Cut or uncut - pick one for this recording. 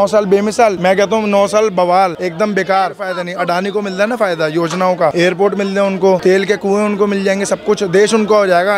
cut